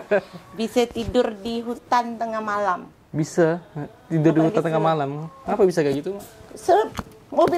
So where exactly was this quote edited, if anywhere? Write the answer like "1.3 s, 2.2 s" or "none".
none